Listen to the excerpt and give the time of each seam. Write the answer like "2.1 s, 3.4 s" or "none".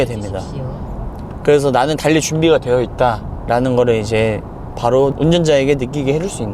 5.2 s